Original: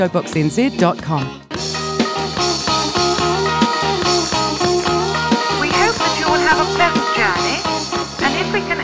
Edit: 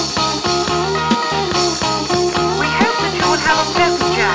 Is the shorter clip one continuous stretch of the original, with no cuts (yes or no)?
yes